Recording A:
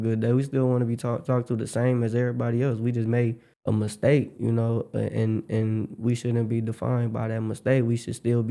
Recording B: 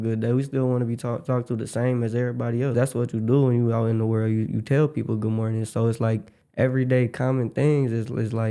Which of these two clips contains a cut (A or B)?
B